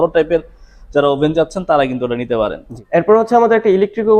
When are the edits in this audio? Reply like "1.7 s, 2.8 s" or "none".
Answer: 2.8 s